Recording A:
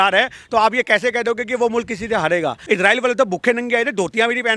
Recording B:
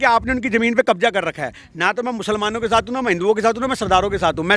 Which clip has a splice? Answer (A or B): A